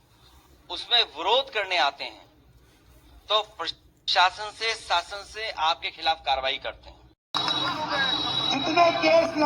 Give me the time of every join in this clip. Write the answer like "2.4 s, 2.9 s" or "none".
6.8 s